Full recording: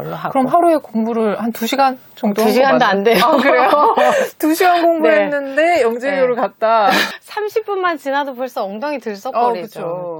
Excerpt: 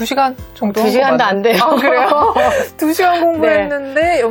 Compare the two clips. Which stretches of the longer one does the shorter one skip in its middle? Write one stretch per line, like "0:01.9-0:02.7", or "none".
none